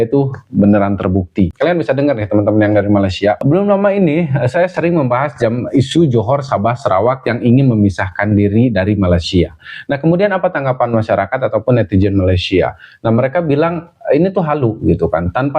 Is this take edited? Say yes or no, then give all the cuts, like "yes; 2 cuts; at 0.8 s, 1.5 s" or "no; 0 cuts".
yes; 2 cuts; at 1.5 s, 3.4 s